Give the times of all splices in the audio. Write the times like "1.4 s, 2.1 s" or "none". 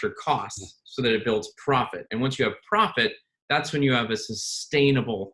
none